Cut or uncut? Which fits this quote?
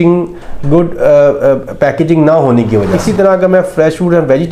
cut